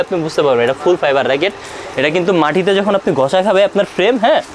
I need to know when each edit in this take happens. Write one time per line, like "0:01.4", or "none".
none